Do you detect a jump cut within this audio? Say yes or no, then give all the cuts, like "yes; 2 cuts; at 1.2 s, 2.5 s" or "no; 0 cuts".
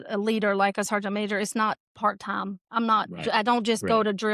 no; 0 cuts